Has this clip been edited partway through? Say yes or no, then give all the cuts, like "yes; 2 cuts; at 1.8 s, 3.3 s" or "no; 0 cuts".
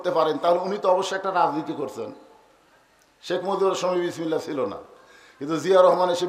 no; 0 cuts